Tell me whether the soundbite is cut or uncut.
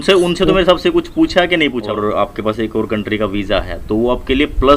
cut